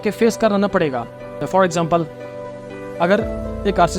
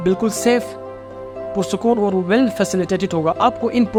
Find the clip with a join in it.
first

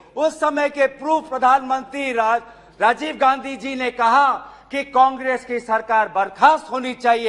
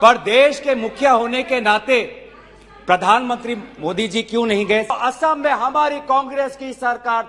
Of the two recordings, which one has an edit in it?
second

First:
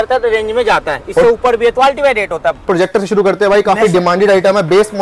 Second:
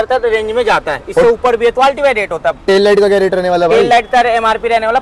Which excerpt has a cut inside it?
first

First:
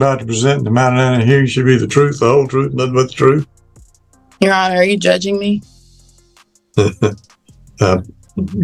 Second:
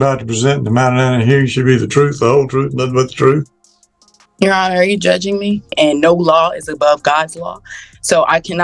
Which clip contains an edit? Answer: second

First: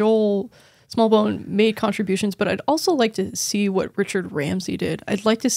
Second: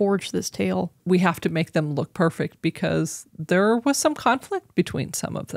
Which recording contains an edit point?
second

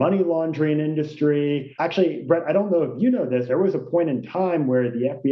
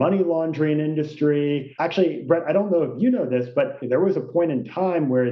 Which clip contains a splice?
first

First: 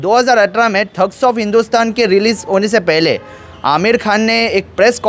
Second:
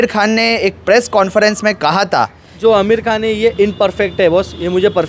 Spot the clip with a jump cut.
second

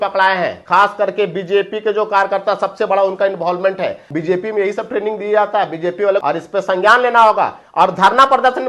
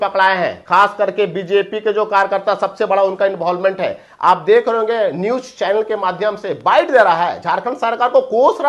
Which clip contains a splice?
first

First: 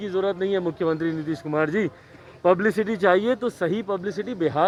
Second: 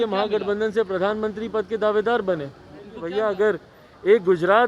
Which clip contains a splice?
second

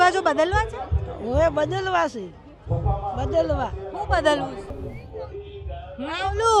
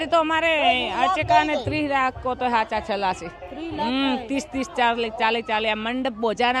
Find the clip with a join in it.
first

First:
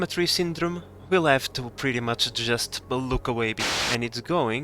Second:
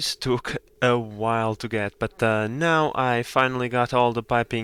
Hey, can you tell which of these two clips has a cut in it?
first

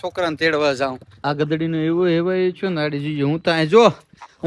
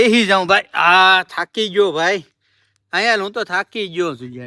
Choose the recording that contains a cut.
first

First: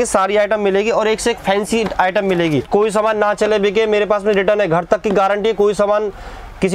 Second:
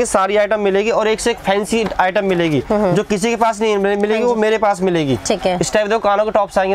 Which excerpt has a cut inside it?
first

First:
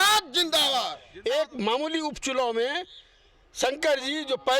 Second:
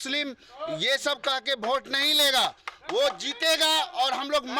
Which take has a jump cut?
first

